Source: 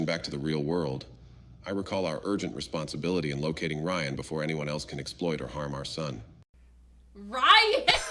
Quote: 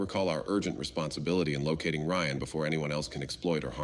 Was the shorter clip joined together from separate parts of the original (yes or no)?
no